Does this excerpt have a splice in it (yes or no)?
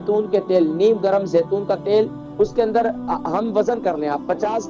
no